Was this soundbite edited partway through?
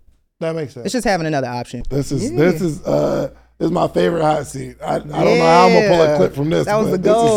yes; 1 cut; at 1.8 s

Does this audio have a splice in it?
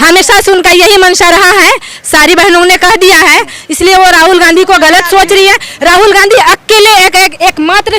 no; 0 cuts

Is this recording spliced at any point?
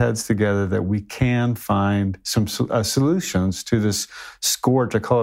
no; 0 cuts

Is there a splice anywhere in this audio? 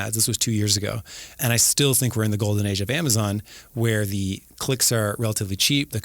yes; 1 cut; at 1.4 s

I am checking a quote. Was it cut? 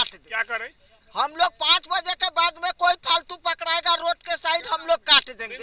no; 0 cuts

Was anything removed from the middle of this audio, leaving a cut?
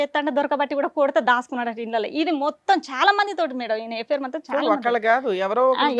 no; 0 cuts

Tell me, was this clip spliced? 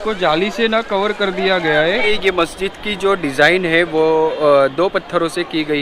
yes; 1 cut; at 2.0 s

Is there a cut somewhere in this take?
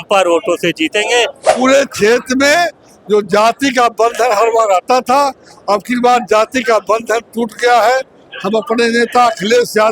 yes; 1 cut; at 1.6 s

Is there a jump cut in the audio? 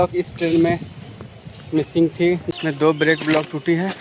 yes; 1 cut; at 2.5 s

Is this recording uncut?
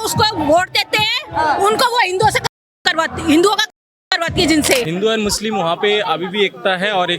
no; 1 cut; at 4.9 s

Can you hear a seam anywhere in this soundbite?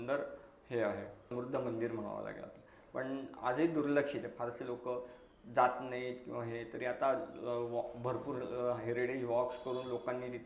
yes; 2 cuts; at 1.3 s, 3.3 s

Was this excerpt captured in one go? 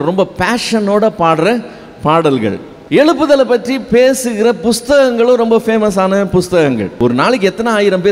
no; 2 cuts; at 2.7 s, 6.9 s

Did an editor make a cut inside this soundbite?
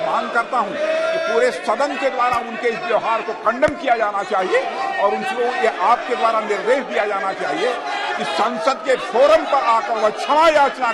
no; 0 cuts

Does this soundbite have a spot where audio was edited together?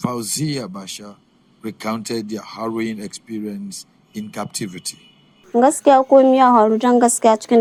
no; 0 cuts

